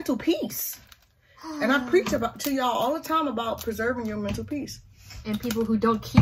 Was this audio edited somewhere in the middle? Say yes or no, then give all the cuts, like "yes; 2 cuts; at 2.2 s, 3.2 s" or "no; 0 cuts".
no; 0 cuts